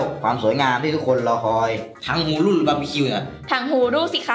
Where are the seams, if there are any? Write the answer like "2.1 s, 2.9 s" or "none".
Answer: 1.9 s

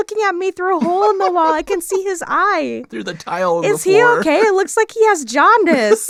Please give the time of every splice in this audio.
none

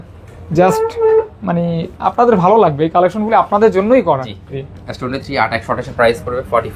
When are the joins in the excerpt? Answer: 4.6 s

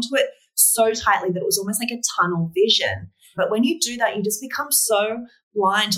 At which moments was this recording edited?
3.3 s

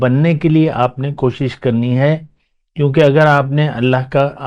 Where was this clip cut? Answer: none

